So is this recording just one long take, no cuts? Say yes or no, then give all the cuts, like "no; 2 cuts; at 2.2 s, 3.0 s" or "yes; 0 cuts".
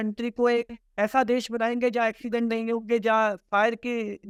yes; 0 cuts